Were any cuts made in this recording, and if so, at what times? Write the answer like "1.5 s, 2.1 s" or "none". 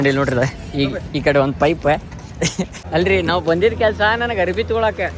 2.8 s